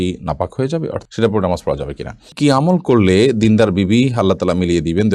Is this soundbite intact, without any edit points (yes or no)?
no